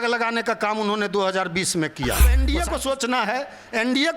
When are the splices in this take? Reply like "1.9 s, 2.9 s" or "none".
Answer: 2.4 s